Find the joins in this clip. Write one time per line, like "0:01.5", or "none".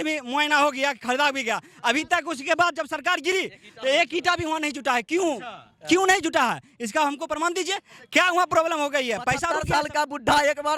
0:09.5